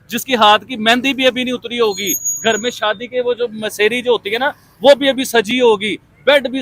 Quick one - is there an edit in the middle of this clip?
no; 0 cuts

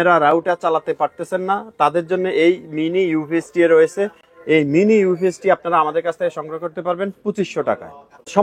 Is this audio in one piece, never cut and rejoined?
yes; 0 cuts

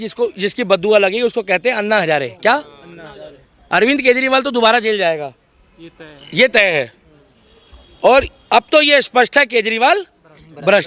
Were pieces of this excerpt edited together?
no; 0 cuts

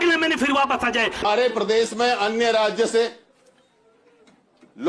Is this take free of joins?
no; 1 cut; at 1.2 s

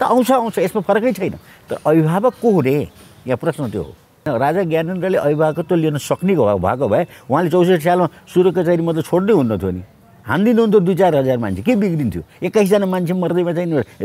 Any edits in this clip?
yes; 1 cut; at 4.2 s

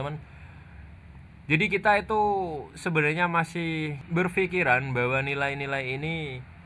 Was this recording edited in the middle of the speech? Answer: yes; 1 cut; at 4.0 s

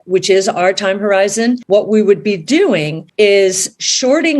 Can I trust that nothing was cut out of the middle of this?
no; 2 cuts; at 1.6 s, 3.0 s

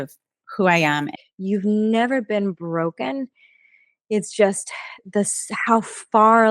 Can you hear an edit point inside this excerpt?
yes; 1 cut; at 1.2 s

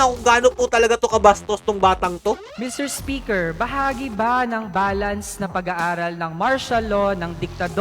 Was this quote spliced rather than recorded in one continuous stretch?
yes; 1 cut; at 2.5 s

